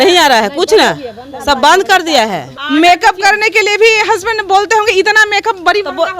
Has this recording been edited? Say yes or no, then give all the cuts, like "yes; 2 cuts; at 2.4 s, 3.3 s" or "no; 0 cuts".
yes; 1 cut; at 2.5 s